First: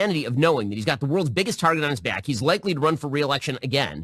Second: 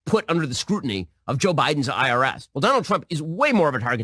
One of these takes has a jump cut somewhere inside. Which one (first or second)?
second